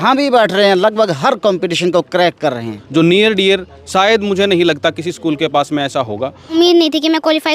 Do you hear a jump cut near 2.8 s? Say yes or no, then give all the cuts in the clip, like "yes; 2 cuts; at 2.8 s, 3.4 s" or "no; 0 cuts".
yes; 2 cuts; at 2.8 s, 6.5 s